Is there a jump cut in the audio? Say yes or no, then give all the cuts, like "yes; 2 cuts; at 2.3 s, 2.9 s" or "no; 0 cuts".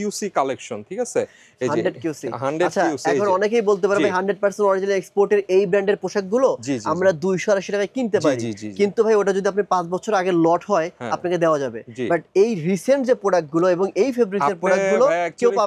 no; 0 cuts